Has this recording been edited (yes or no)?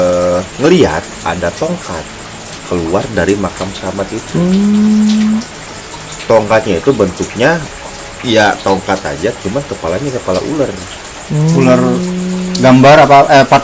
no